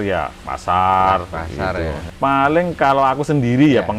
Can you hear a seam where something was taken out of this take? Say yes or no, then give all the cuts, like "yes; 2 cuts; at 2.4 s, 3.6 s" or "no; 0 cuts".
yes; 1 cut; at 2.0 s